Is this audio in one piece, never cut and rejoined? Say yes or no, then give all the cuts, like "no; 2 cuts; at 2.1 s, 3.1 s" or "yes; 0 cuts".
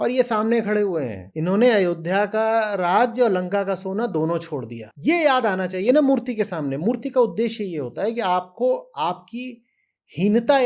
no; 2 cuts; at 1.2 s, 4.8 s